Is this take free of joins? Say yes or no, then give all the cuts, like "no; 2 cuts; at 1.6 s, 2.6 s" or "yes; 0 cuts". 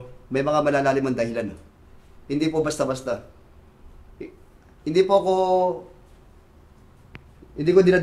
yes; 0 cuts